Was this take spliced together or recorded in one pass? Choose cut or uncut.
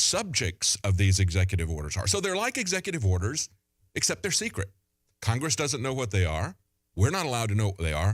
uncut